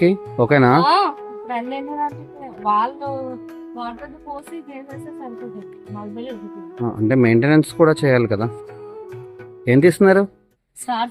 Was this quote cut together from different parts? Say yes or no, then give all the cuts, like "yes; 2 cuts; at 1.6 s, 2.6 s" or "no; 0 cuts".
no; 0 cuts